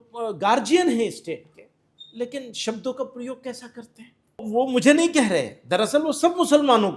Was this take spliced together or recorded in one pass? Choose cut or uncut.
cut